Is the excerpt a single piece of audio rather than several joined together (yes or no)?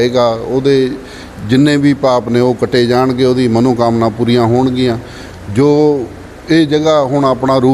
yes